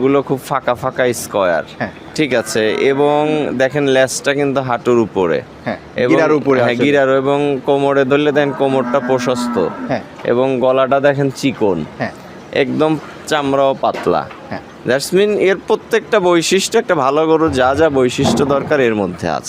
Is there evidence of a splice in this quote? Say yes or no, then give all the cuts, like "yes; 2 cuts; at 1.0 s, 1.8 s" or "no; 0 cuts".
no; 0 cuts